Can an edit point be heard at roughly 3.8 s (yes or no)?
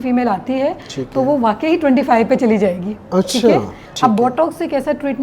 yes